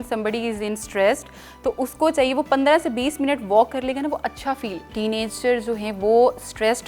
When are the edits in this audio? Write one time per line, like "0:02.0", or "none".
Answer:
0:04.9